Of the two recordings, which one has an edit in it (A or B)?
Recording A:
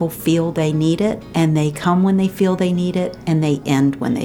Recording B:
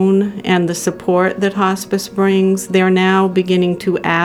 A